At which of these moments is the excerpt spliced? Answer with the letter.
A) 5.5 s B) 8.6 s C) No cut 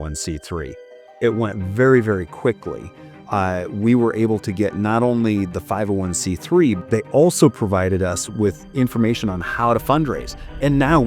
B